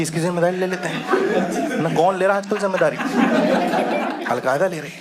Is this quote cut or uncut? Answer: uncut